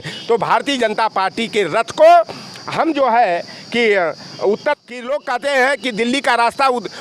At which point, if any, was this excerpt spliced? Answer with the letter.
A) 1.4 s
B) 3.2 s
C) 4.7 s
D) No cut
C